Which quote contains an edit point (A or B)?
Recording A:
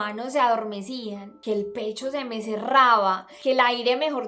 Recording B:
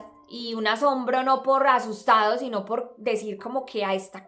A